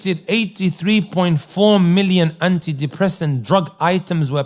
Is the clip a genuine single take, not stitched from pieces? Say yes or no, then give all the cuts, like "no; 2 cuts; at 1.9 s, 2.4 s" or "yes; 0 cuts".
yes; 0 cuts